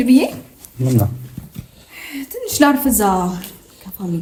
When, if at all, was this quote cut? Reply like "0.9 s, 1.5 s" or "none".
none